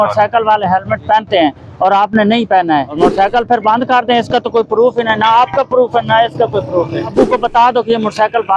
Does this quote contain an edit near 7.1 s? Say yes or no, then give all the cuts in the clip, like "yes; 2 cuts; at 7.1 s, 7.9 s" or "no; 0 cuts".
yes; 2 cuts; at 3.0 s, 7.1 s